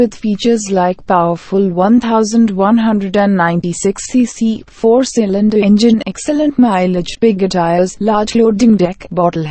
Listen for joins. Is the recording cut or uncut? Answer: uncut